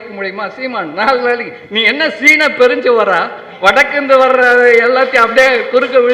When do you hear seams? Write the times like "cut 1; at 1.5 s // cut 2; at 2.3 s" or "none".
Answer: none